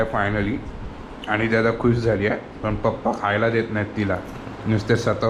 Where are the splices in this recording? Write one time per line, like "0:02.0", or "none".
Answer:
none